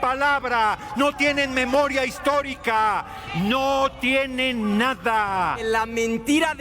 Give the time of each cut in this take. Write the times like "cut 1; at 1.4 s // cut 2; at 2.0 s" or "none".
cut 1; at 5.6 s

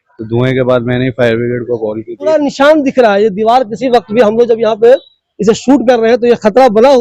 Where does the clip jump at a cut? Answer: cut 1; at 2.3 s

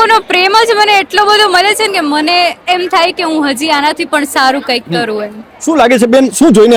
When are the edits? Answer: none

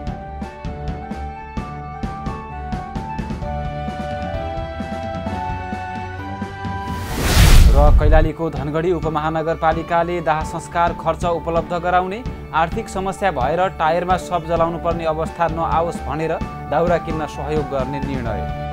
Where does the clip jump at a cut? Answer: cut 1; at 1.4 s

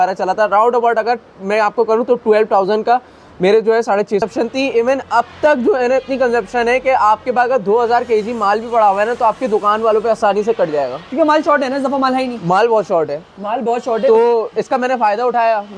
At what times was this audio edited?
cut 1; at 4.2 s

